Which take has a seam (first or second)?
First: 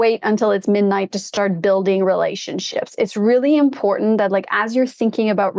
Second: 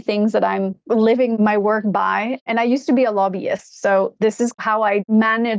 second